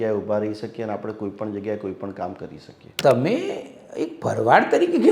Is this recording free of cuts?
no; 1 cut; at 2.9 s

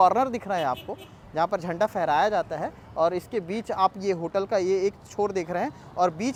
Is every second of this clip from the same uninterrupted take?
yes; 0 cuts

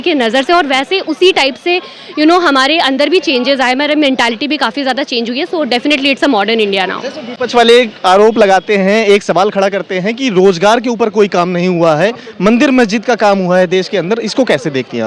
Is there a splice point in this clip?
no; 0 cuts

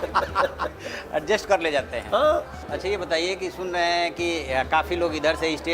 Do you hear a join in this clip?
yes; 1 cut; at 2.6 s

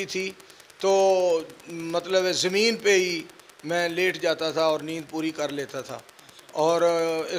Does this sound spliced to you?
no; 0 cuts

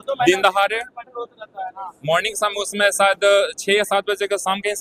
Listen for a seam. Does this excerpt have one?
no; 0 cuts

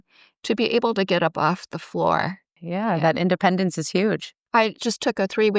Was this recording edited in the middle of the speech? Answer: yes; 2 cuts; at 2.6 s, 4.3 s

